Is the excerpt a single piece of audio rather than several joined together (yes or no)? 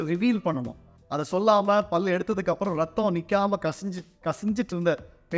no